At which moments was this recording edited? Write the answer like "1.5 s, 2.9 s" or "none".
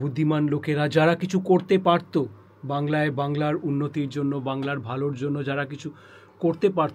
none